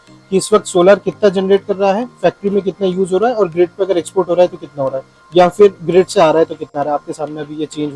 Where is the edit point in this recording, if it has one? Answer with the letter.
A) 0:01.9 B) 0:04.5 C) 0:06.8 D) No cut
D